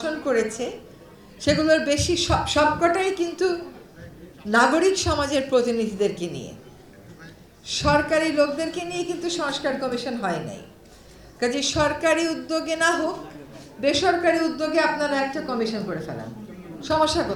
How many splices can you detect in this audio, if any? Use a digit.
0